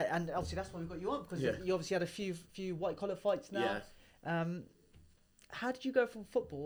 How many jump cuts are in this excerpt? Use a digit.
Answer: 0